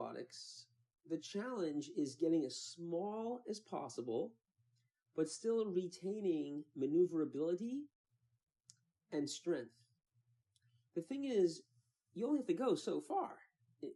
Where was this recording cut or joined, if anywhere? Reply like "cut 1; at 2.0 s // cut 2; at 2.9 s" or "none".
none